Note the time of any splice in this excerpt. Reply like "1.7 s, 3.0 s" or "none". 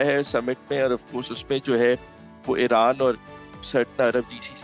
none